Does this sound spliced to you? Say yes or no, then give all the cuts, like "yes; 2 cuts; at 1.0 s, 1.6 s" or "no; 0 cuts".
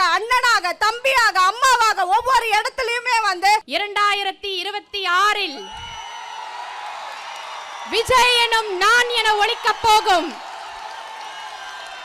yes; 1 cut; at 3.7 s